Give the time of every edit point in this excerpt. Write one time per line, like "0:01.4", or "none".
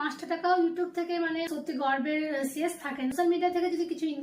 0:01.5
0:03.1